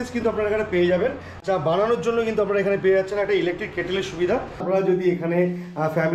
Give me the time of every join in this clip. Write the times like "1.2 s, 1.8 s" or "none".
4.6 s